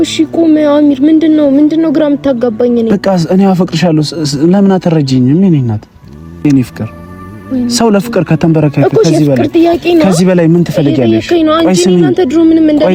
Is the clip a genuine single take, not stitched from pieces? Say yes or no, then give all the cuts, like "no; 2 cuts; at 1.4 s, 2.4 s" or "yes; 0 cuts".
yes; 0 cuts